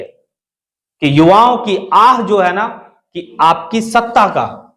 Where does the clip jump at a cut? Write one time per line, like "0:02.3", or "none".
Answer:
0:03.3